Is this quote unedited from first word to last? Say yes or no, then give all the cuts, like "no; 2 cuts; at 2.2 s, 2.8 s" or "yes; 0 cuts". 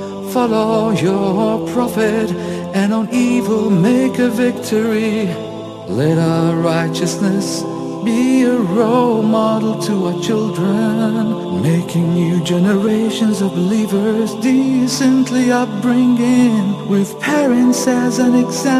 yes; 0 cuts